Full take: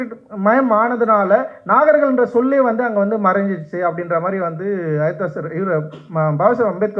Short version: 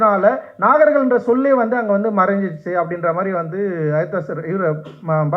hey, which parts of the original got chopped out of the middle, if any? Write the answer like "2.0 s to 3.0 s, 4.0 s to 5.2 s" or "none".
none

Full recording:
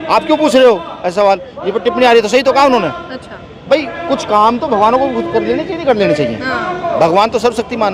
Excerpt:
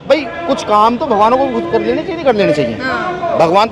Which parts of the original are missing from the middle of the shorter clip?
none

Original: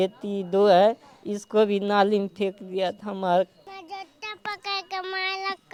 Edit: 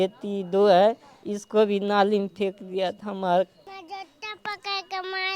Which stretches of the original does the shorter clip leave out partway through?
none

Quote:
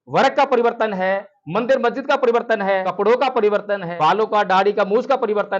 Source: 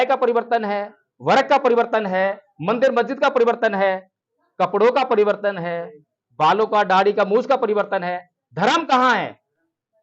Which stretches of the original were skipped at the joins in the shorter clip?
4.0 s to 4.6 s, 5.6 s to 6.3 s

